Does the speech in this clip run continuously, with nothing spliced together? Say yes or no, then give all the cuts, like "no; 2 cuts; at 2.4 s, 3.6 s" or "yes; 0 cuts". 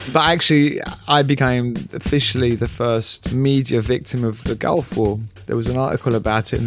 no; 2 cuts; at 3.2 s, 5.3 s